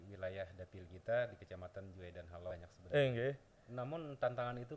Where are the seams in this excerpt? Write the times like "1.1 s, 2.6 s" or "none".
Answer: 2.5 s